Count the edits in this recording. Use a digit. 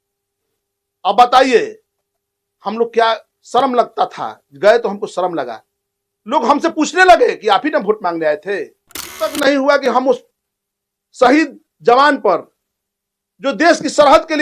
1